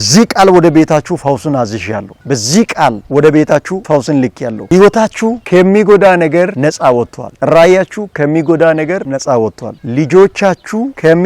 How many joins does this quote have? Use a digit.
0